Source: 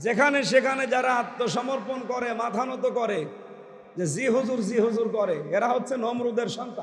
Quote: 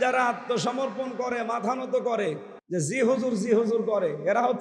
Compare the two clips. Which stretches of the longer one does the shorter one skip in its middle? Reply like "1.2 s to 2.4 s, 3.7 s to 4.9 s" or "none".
3.4 s to 3.8 s